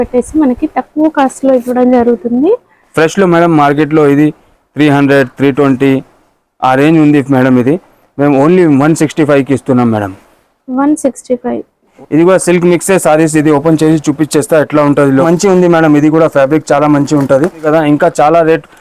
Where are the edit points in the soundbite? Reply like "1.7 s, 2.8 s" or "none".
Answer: 11.9 s, 15.2 s, 17.7 s